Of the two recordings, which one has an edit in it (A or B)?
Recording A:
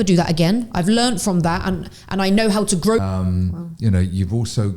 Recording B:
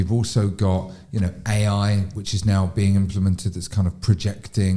A